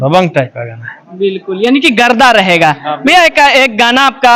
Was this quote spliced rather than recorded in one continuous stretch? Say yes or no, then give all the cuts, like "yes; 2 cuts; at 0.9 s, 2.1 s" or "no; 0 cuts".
no; 0 cuts